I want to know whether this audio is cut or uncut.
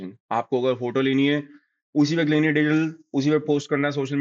uncut